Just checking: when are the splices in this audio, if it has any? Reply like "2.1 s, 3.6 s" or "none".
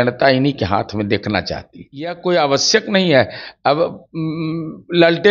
2.2 s